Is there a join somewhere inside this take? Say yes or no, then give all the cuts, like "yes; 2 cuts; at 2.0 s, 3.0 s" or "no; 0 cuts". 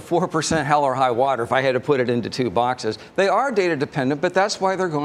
no; 0 cuts